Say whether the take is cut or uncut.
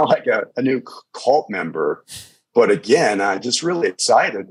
uncut